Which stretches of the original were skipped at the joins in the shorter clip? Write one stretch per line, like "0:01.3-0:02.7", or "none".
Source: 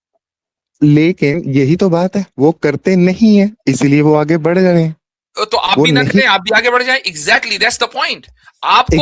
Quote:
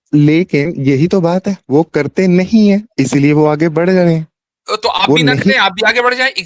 none